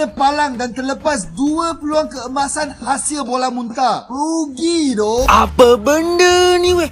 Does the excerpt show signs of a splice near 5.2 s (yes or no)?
yes